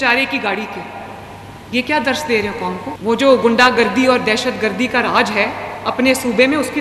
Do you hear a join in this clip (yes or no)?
yes